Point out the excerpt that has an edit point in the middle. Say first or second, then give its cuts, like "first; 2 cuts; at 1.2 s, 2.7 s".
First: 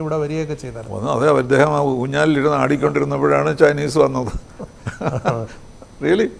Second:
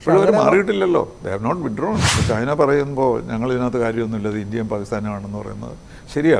second; 1 cut; at 2.1 s